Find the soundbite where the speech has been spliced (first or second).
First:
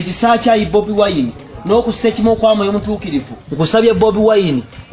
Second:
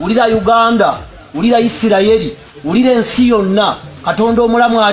first